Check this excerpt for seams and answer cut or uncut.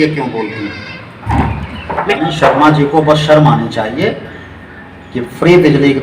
cut